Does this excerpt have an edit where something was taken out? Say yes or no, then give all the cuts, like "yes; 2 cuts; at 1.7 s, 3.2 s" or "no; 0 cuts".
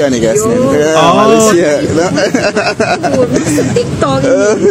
no; 0 cuts